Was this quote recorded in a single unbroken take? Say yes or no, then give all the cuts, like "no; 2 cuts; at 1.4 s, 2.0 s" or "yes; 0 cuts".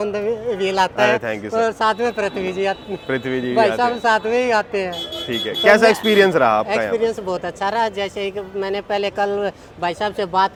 yes; 0 cuts